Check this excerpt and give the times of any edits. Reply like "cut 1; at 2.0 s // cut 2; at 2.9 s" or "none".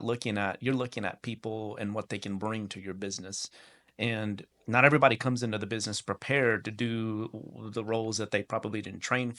none